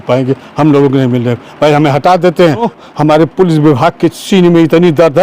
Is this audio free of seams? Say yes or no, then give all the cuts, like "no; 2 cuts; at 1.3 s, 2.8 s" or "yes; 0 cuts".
no; 1 cut; at 2.7 s